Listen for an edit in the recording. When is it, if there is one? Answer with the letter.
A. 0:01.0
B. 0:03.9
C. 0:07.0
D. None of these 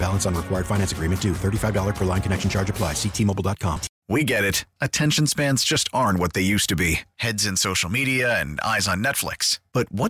B